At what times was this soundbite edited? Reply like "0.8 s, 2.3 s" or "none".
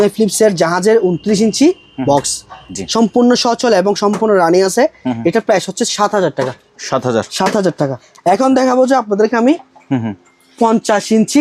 none